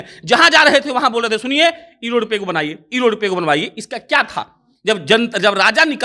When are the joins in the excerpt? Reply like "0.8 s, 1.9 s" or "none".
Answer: none